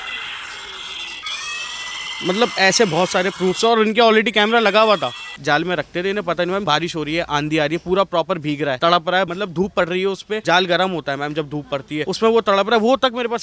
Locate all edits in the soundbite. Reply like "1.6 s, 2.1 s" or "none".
5.3 s, 6.6 s, 8.8 s, 9.3 s, 10.4 s, 12.0 s